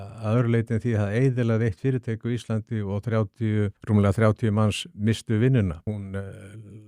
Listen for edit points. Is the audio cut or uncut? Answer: cut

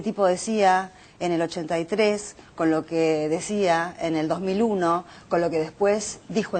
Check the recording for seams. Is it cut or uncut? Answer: uncut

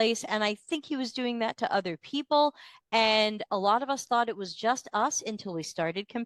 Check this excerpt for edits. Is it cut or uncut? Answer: uncut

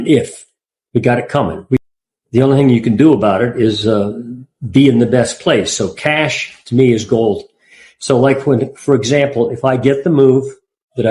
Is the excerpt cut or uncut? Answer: cut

